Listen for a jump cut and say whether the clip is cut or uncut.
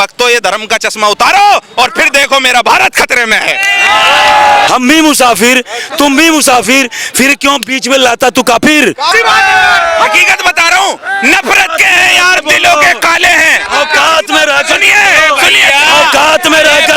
cut